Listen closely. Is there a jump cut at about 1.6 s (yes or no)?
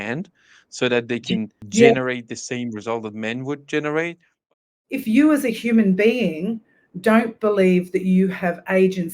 yes